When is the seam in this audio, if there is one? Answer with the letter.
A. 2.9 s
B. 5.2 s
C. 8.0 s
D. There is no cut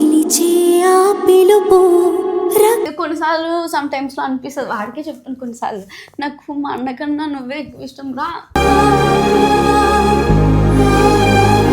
A